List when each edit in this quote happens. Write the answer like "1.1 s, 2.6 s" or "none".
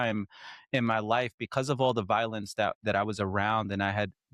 none

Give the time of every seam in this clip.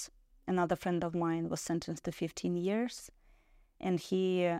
none

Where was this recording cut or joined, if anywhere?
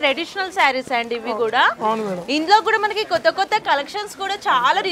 none

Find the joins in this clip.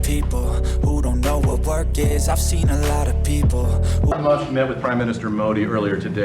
4.1 s

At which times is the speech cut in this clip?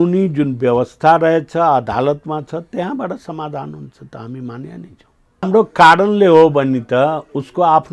5.5 s

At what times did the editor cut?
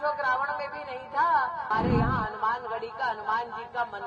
1.7 s

